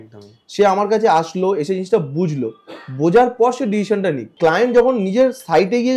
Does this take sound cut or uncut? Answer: cut